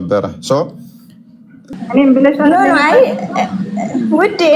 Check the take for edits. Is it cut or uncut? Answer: cut